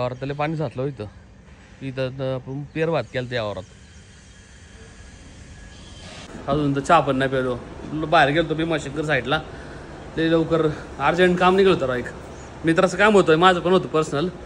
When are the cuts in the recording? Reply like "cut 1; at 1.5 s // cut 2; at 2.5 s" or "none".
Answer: cut 1; at 6.3 s